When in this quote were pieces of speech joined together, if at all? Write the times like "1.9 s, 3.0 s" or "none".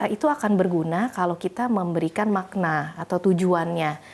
none

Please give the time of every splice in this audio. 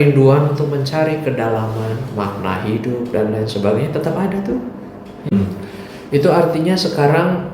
5.3 s

